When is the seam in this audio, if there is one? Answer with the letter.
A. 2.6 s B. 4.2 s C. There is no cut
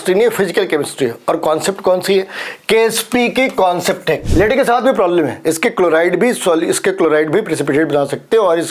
B